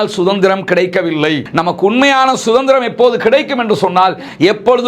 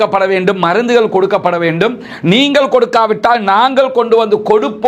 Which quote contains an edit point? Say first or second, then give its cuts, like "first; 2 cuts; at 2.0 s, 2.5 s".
first; 1 cut; at 1.4 s